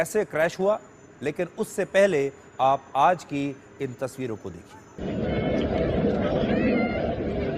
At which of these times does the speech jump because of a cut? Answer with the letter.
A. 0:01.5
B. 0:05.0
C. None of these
B